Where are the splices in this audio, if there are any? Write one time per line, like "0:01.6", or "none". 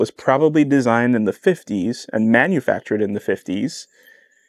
none